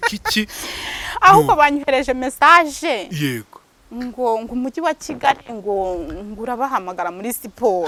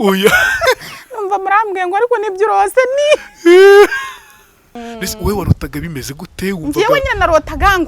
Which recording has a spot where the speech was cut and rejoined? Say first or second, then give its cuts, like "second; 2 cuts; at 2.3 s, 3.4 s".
second; 1 cut; at 4.8 s